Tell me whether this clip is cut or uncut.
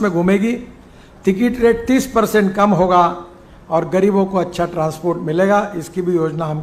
uncut